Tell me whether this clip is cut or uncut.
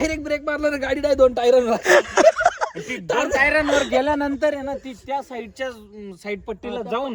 uncut